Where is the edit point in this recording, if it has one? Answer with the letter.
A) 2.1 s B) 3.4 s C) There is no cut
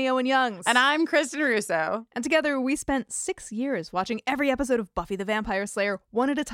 C